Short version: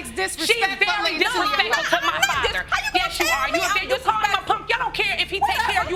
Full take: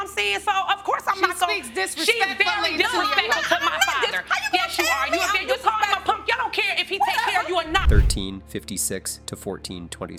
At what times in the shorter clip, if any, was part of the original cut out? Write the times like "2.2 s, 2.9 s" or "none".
none